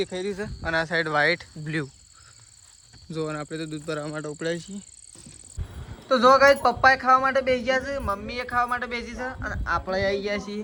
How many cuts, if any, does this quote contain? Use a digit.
0